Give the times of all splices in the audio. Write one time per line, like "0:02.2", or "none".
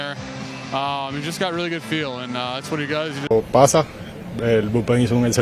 0:03.3